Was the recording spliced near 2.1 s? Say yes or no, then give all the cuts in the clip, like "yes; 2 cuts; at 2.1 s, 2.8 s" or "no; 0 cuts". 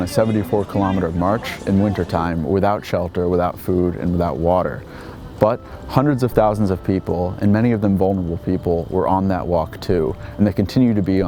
no; 0 cuts